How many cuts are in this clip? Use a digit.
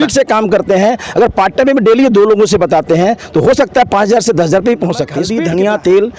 1